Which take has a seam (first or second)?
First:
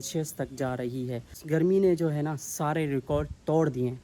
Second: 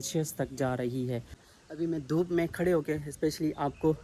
second